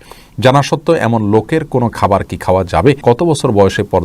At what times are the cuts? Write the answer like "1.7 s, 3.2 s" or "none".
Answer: 3.0 s